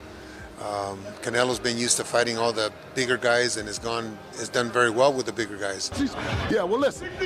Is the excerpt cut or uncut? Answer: cut